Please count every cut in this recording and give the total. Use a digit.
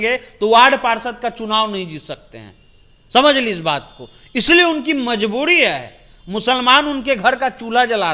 0